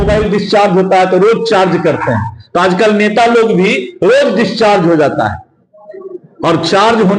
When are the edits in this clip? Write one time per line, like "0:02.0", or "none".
none